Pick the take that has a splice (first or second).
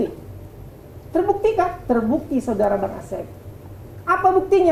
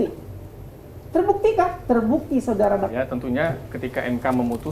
second